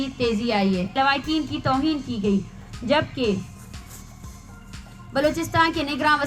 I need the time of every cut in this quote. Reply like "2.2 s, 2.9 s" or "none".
0.9 s